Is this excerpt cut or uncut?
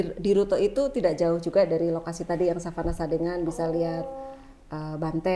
uncut